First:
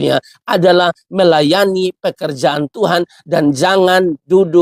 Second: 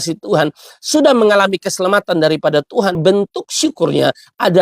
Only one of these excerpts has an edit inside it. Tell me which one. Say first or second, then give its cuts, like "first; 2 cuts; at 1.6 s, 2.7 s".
second; 1 cut; at 3.0 s